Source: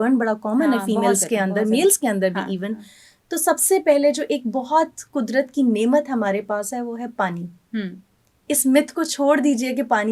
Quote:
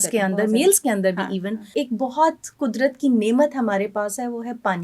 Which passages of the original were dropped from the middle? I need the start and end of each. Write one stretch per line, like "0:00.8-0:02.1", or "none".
0:02.9-0:04.2

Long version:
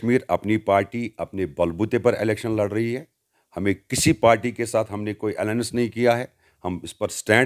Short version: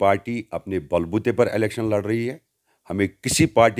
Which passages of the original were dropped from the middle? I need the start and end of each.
none

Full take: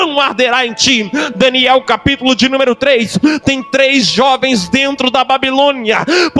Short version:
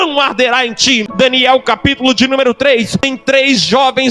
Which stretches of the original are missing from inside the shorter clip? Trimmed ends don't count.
0:01.1-0:01.3
0:03.2-0:03.4

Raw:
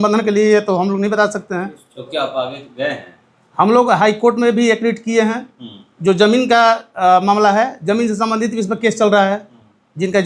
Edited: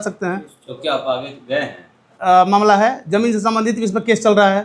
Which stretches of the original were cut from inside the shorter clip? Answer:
0:03.4-0:06.9

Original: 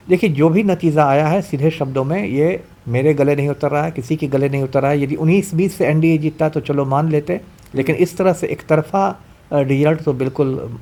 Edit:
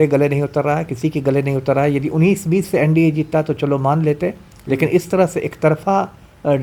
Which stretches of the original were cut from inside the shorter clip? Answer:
none

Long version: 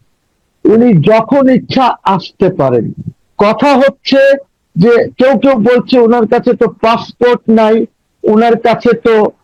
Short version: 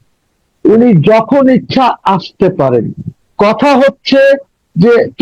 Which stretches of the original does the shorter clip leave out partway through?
none

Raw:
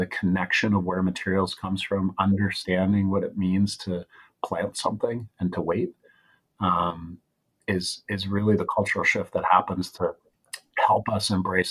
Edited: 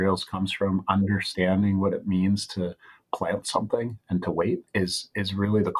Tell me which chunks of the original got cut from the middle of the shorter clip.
0:06.0-0:07.6

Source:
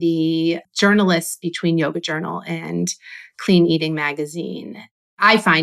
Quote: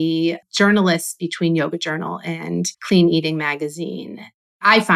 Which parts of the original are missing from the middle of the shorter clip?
0:03.0-0:03.3

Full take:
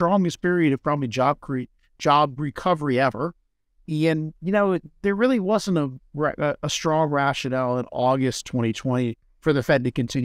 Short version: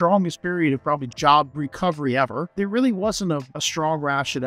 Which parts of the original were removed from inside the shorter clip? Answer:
0:01.1-0:01.9
0:03.3-0:04.9
0:06.0-0:06.7

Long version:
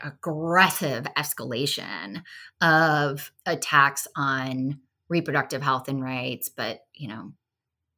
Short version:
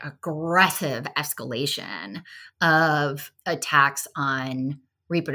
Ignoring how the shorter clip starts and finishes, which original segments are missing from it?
none

